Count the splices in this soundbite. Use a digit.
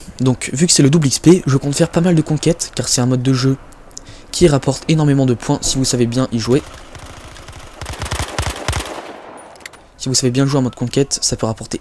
1